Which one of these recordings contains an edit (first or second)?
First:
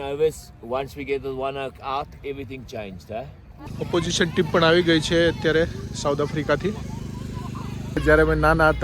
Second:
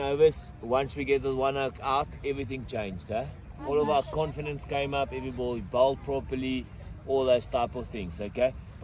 first